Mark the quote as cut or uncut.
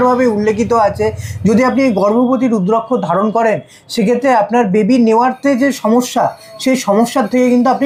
uncut